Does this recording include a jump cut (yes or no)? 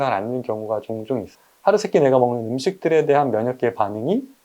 yes